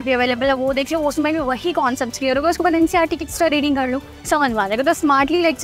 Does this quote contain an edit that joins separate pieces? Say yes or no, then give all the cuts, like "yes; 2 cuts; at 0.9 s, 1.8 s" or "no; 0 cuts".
no; 0 cuts